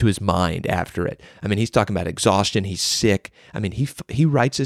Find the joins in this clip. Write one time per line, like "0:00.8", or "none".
none